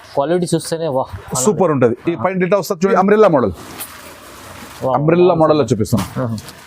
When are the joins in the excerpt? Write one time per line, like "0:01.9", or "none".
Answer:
0:02.9